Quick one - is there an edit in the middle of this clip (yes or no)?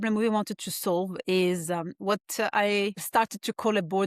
yes